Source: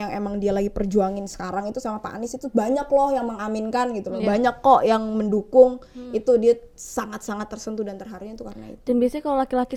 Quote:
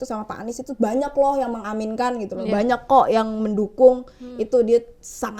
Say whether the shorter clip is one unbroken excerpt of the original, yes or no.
yes